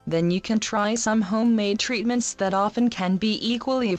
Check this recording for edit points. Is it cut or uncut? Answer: cut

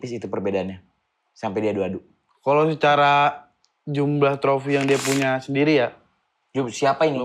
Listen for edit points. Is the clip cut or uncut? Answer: uncut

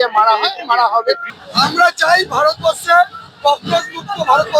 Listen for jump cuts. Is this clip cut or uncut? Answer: cut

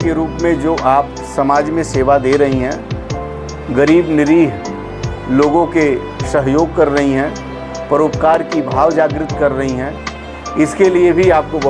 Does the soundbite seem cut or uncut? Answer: uncut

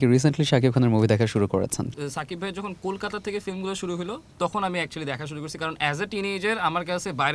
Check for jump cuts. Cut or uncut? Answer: uncut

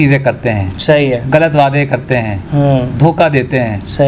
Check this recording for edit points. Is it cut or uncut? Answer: uncut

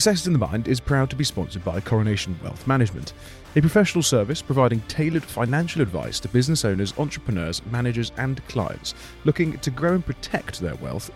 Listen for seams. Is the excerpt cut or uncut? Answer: uncut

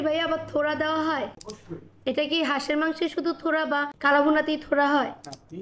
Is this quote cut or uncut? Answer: cut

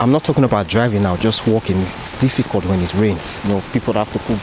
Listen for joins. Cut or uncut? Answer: uncut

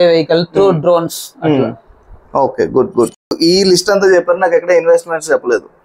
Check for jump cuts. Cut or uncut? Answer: cut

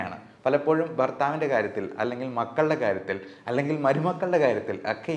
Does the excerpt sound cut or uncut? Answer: uncut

